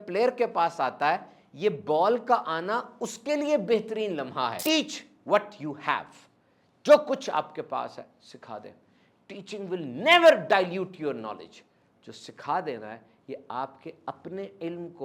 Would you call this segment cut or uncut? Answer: cut